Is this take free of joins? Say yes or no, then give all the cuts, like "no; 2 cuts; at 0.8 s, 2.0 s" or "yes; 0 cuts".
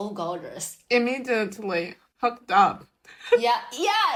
yes; 0 cuts